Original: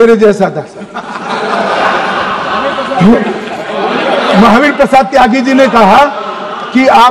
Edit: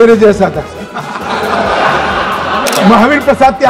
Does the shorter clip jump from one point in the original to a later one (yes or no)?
yes